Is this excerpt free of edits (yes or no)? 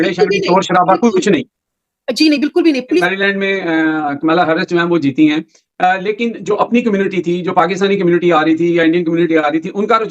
no